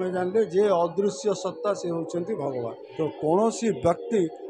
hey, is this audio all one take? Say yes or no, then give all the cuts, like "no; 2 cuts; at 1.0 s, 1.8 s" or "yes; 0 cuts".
no; 1 cut; at 2.8 s